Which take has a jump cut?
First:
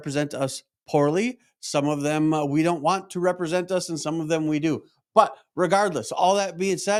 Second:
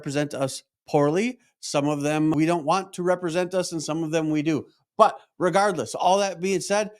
second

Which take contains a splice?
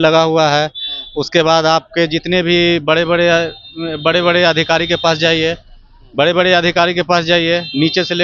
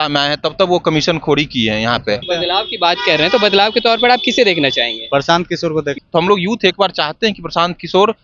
second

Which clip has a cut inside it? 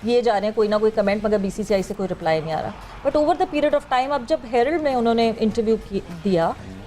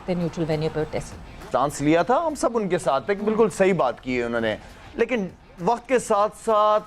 second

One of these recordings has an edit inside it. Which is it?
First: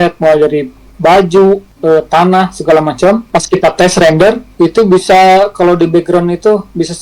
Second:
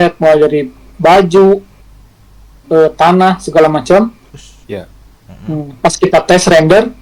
first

